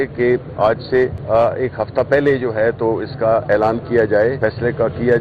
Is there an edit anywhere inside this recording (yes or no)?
yes